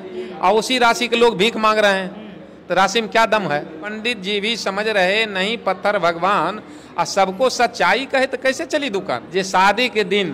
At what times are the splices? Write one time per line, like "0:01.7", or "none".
0:03.8
0:09.2

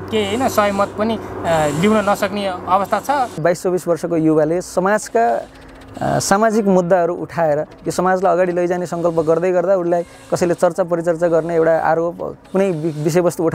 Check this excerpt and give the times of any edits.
0:03.4

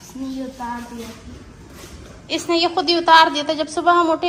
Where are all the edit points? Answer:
none

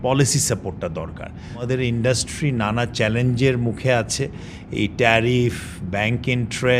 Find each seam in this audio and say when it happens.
0:01.6

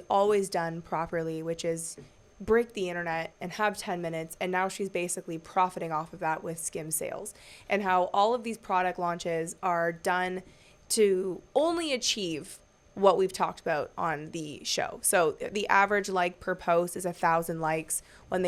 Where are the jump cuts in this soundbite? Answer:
none

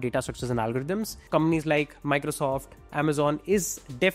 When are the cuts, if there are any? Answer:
0:01.2

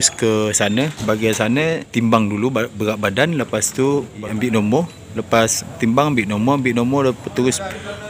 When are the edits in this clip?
0:01.9
0:04.2

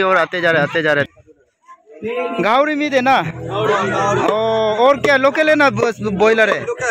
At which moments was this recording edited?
0:01.1

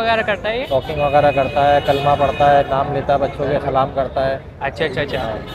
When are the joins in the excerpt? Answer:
none

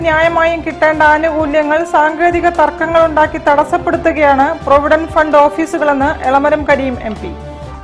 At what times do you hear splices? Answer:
none

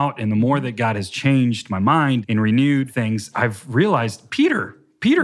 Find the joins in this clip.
0:02.2
0:03.2
0:04.2

